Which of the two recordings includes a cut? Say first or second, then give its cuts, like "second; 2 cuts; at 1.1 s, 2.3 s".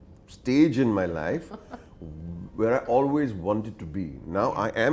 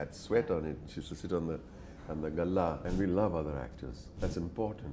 second; 1 cut; at 2.8 s